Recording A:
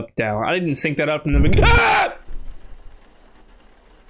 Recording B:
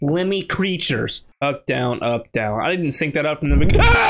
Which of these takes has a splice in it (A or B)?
B